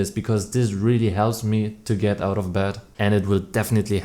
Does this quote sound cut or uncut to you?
cut